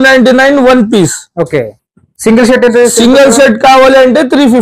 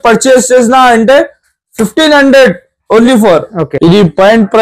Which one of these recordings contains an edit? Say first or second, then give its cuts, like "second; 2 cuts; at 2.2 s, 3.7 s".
second; 1 cut; at 3.6 s